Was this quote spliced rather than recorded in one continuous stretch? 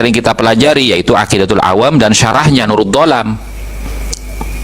no; 0 cuts

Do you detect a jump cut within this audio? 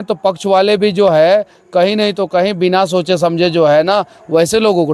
no; 0 cuts

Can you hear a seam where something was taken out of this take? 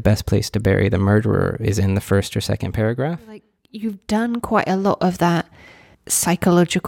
yes; 1 cut; at 3.5 s

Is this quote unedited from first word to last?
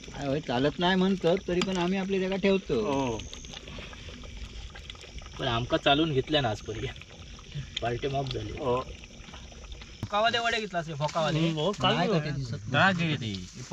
no; 1 cut; at 10.1 s

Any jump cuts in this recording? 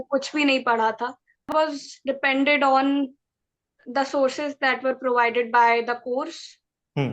yes; 1 cut; at 1.5 s

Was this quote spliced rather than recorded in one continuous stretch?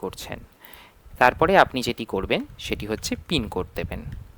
no; 0 cuts

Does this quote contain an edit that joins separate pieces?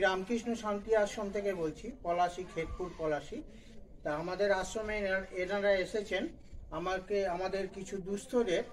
no; 0 cuts

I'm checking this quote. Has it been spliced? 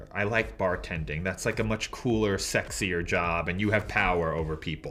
no; 0 cuts

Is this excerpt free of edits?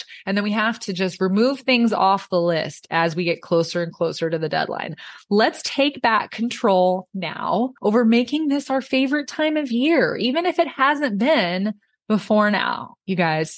no; 1 cut; at 7.7 s

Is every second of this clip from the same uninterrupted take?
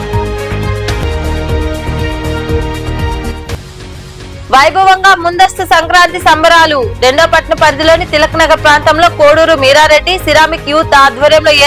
no; 1 cut; at 1.0 s

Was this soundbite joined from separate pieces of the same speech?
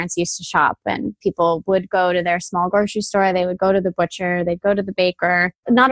yes; 1 cut; at 1.2 s

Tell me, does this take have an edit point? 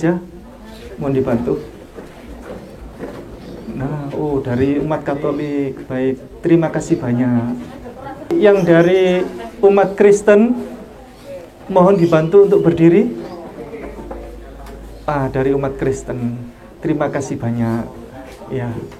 yes; 1 cut; at 8.3 s

